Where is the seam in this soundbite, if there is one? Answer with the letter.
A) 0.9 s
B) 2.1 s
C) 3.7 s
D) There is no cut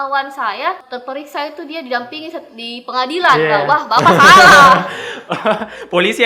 A